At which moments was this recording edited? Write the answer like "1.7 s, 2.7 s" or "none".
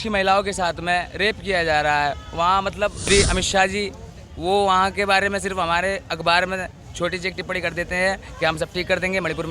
3.1 s